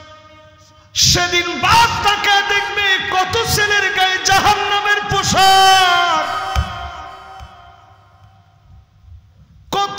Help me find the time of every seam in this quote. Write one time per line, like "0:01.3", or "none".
none